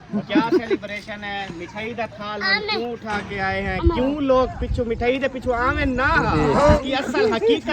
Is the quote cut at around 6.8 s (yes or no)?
yes